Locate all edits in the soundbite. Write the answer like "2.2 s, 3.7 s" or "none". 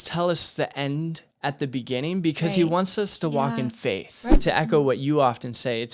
1.3 s, 4.4 s